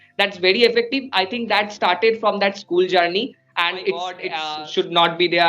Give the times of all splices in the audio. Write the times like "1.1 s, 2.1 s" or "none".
4.3 s

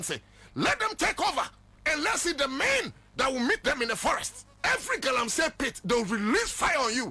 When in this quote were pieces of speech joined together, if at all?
4.4 s

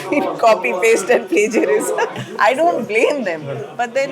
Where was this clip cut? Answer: 2.2 s

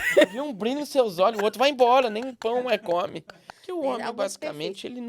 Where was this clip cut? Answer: 3.5 s

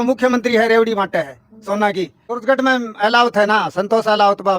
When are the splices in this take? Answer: 2.2 s

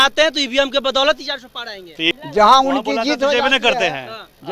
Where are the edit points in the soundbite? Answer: 2.1 s

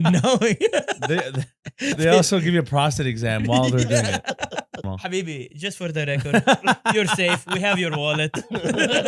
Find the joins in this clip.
1.9 s, 4.9 s

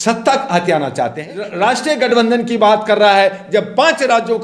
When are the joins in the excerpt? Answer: 1.2 s

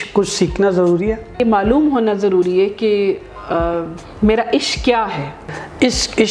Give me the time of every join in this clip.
1.4 s, 5.5 s

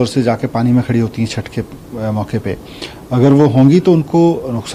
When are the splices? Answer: none

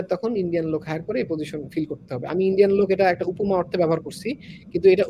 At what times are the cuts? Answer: none

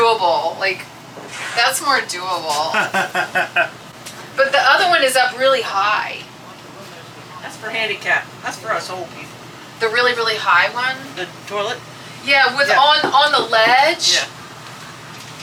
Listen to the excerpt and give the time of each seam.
none

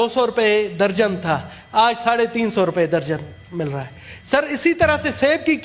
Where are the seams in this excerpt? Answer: none

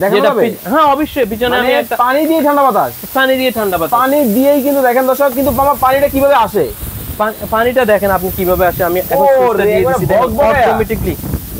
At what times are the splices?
none

